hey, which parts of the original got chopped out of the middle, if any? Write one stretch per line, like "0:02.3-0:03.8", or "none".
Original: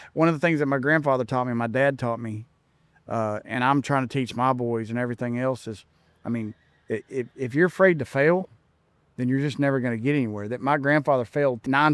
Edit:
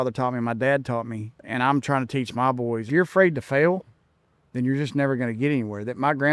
0:02.6-0:03.4
0:04.9-0:07.5

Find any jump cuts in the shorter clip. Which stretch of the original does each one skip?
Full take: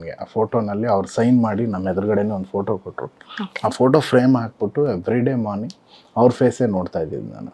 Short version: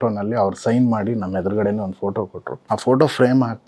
0:03.0-0:03.4

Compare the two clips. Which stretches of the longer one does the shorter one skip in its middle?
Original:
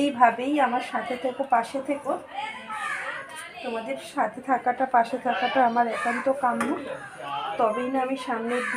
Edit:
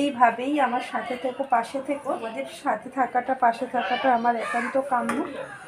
0:02.3-0:03.8

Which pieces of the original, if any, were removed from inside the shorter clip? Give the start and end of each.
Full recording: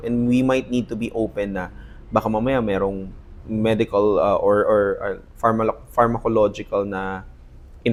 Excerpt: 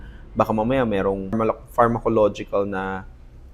0:03.1-0:05.5

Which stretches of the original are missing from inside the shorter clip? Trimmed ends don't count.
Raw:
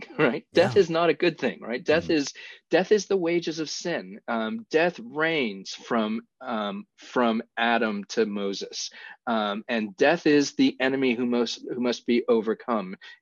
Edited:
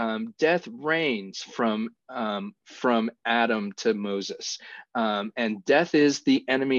none

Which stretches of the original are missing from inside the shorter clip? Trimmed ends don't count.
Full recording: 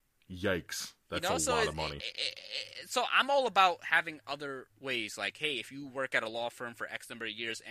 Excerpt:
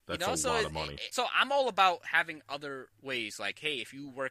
0:02.0-0:02.8

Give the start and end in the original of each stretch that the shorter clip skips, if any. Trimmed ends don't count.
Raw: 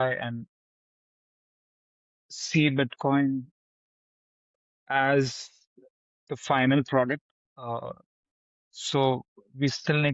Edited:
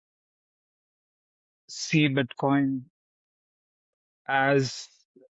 none

